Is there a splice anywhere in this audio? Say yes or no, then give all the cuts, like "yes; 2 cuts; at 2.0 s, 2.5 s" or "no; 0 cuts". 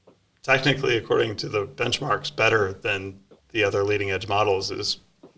no; 0 cuts